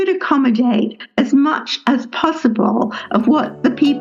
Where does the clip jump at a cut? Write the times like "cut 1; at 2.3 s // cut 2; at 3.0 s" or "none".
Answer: none